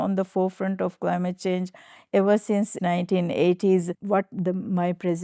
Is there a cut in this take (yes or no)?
yes